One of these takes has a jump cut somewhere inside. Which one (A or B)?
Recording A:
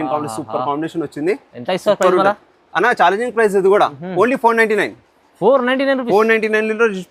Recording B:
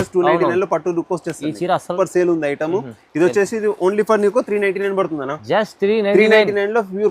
B